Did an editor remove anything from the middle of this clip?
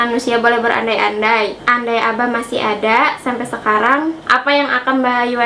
yes; 2 cuts; at 1.6 s, 4.2 s

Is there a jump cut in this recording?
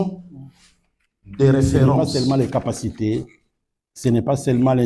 yes; 1 cut; at 2.0 s

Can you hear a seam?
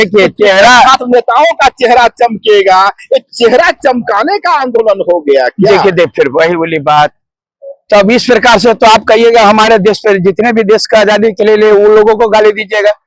no; 0 cuts

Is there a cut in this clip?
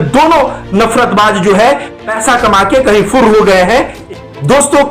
yes; 1 cut; at 4.0 s

